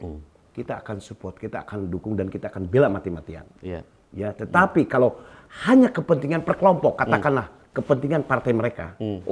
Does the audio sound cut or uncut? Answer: uncut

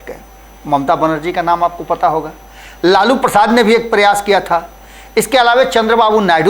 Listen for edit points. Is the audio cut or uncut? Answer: uncut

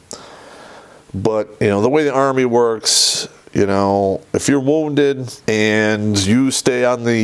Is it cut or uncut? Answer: cut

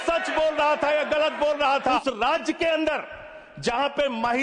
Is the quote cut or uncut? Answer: cut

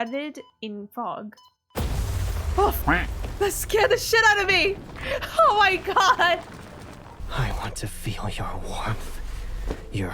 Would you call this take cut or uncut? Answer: cut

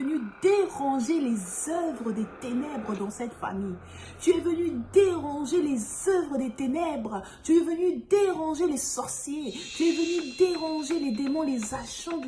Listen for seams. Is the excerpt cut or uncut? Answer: uncut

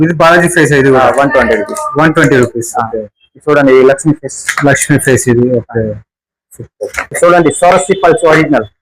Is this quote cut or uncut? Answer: cut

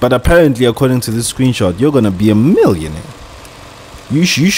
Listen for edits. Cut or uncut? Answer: uncut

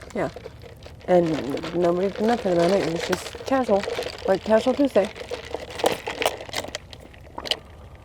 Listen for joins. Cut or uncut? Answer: cut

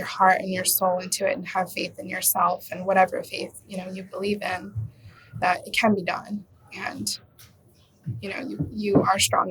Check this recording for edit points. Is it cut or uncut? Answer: uncut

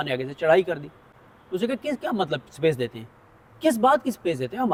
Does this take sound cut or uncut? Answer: uncut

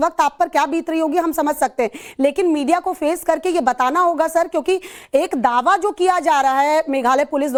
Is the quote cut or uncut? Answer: uncut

